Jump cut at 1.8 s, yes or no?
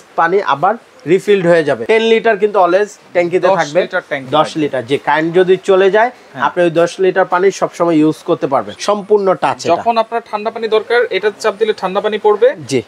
yes